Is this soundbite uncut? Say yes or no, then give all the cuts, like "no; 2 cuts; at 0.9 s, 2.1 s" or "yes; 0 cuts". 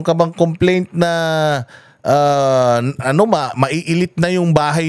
yes; 0 cuts